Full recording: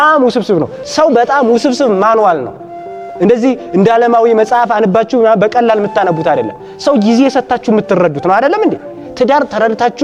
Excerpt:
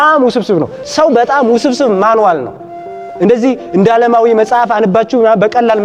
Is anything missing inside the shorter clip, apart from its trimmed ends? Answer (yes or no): no